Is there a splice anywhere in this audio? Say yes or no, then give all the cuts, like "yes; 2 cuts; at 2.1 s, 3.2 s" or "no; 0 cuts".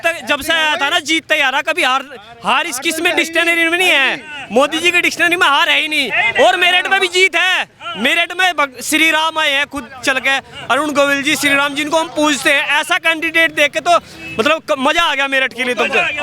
no; 0 cuts